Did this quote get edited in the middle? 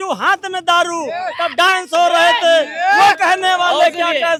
no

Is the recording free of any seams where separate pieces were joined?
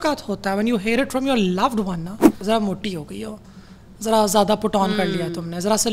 no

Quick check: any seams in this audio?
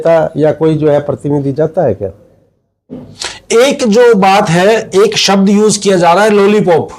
no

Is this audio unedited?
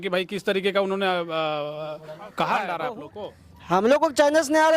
no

